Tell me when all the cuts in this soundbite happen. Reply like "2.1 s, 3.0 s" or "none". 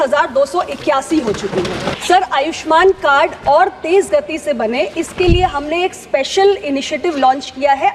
1.9 s

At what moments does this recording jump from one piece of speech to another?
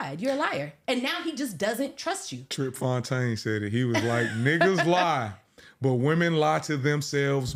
none

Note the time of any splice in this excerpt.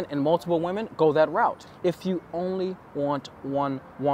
1.7 s

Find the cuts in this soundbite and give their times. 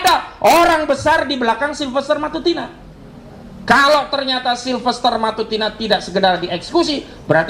none

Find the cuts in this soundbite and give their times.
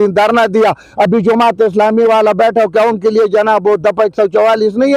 none

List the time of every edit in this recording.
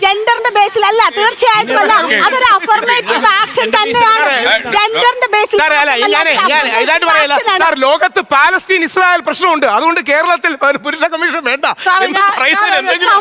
none

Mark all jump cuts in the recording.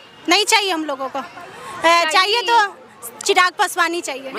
none

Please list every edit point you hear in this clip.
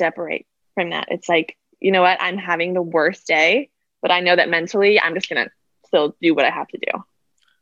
none

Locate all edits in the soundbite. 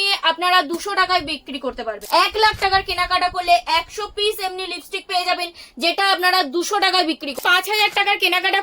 1.9 s, 7.3 s

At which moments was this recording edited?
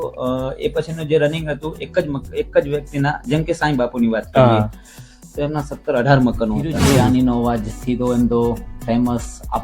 7.0 s

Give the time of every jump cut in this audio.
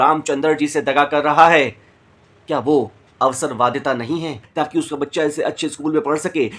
4.4 s

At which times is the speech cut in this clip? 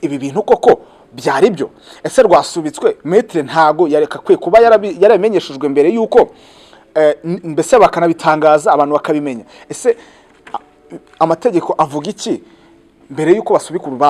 none

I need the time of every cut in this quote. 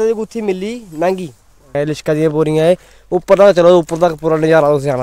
1.7 s

